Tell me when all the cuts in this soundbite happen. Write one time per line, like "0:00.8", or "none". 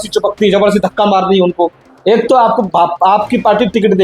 0:01.9